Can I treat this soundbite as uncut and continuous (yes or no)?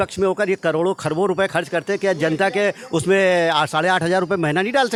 yes